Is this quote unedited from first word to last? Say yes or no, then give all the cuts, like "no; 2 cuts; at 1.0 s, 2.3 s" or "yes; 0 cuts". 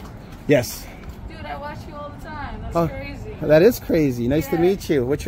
yes; 0 cuts